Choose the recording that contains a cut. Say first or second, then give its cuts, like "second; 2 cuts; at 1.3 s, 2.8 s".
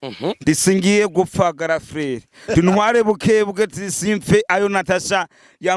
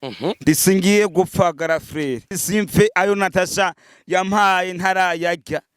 second; 1 cut; at 2.3 s